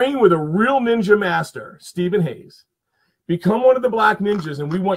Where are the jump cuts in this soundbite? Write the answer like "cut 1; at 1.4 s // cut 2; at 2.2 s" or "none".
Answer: none